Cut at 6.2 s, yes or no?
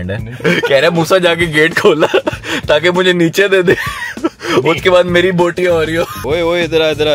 yes